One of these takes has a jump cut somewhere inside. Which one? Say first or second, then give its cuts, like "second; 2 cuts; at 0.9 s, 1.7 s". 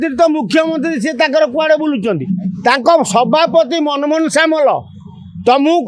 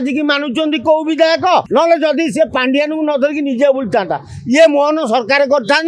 second; 1 cut; at 1.7 s